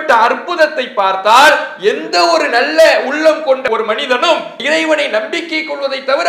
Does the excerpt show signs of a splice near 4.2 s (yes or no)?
yes